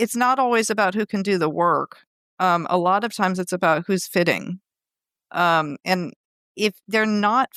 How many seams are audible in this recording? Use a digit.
0